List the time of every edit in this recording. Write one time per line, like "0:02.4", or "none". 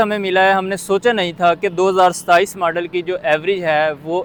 none